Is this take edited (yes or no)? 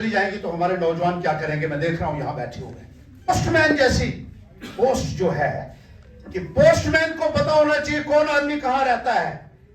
yes